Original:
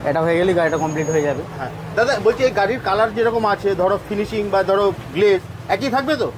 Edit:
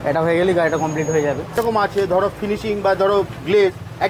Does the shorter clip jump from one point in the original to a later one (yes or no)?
yes